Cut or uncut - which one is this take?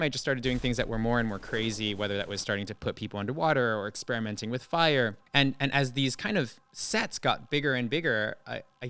cut